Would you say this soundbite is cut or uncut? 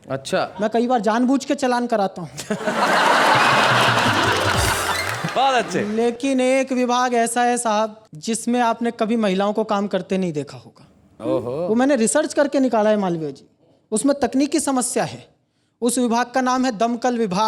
uncut